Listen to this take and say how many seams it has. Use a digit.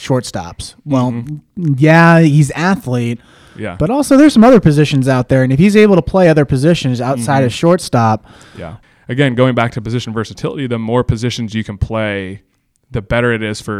1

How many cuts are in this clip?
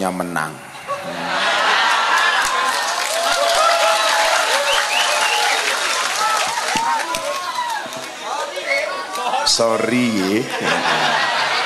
0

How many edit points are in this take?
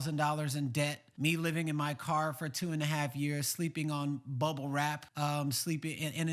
2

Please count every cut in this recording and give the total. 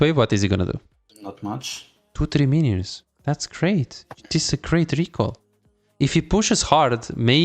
1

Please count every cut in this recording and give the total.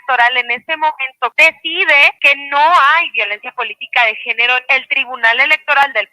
3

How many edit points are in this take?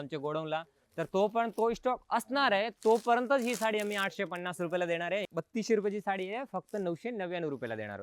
1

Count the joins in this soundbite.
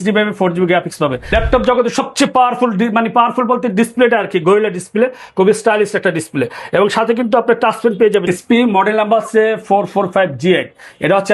2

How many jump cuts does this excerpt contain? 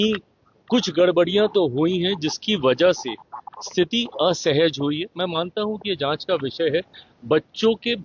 0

